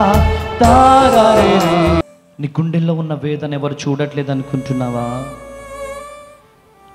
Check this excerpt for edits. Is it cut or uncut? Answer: cut